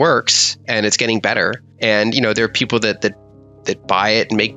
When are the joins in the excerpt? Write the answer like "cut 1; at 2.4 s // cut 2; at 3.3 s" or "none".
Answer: none